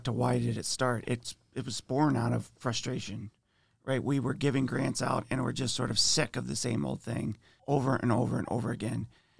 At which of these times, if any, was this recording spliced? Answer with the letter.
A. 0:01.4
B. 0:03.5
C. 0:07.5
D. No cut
C